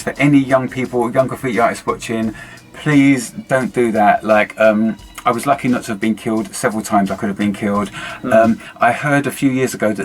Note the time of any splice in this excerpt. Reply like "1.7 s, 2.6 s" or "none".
none